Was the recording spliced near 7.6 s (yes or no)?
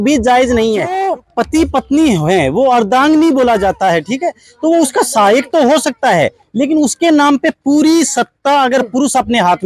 no